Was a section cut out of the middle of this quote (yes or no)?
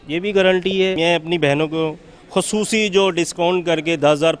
yes